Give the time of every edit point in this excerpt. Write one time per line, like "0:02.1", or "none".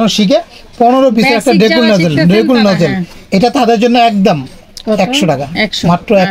none